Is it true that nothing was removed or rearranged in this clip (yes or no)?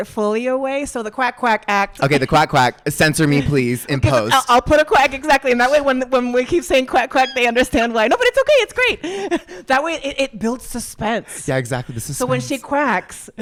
yes